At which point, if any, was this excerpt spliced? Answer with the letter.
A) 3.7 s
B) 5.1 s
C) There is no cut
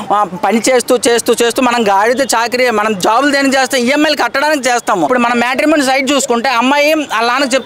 B